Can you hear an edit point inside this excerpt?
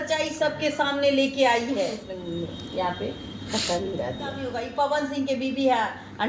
yes; 2 cuts; at 2.1 s, 4.6 s

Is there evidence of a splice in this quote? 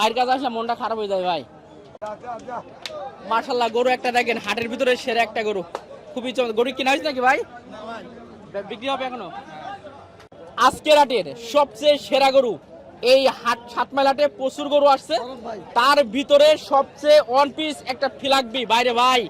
yes; 2 cuts; at 2.0 s, 10.3 s

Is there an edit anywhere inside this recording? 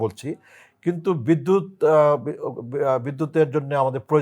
no; 0 cuts

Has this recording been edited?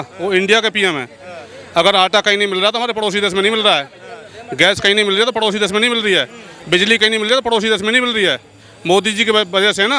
no; 0 cuts

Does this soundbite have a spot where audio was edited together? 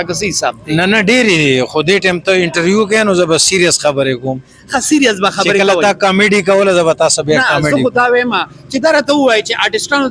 no; 0 cuts

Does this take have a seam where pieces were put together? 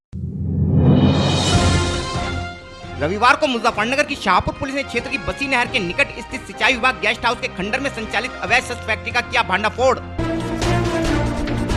no; 0 cuts

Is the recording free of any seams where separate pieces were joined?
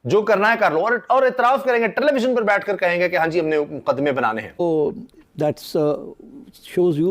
no; 1 cut; at 4.5 s

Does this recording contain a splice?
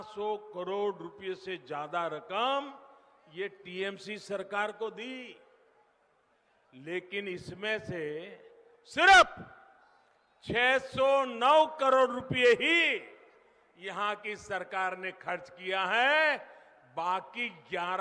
no; 0 cuts

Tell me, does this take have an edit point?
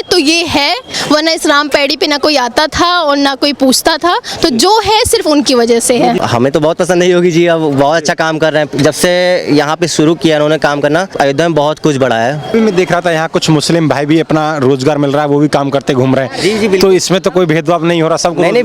yes; 4 cuts; at 0.9 s, 6.2 s, 11.1 s, 12.5 s

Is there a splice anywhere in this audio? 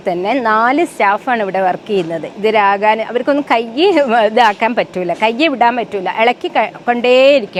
no; 0 cuts

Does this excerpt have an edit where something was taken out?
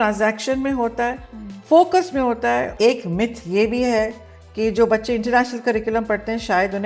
yes; 1 cut; at 2.7 s

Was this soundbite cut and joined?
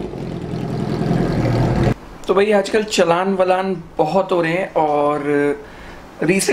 yes; 1 cut; at 1.9 s

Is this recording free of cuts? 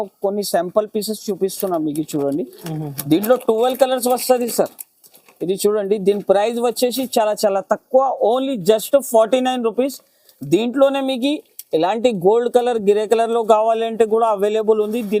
yes; 0 cuts

